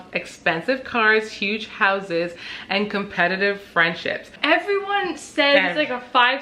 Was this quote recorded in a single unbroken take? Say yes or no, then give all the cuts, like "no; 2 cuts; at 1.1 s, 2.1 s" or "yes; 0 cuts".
no; 1 cut; at 4.4 s